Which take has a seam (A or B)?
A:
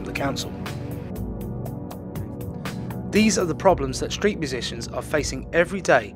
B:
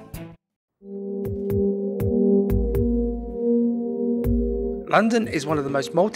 A